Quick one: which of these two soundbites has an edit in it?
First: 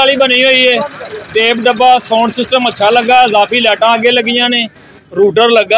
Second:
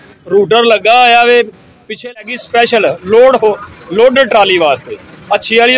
second; 1 cut; at 2.0 s

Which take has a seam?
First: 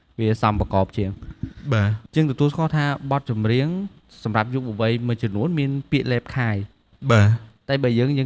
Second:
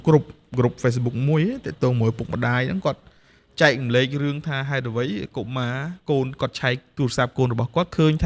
first; 1 cut; at 2.0 s

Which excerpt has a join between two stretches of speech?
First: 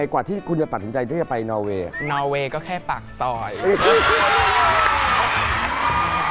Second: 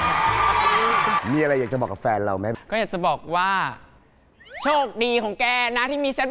second; 2 cuts; at 1.2 s, 2.5 s

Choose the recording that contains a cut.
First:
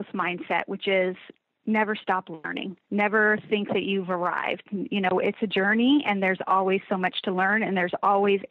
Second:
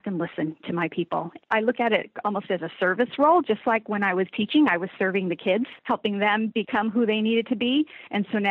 second; 2 cuts; at 1.4 s, 5.8 s

